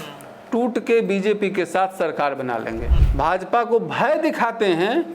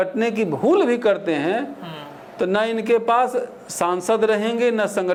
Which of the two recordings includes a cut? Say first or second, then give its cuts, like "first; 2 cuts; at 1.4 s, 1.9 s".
first; 1 cut; at 3.0 s